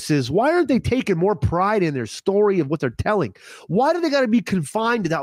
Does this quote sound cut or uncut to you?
uncut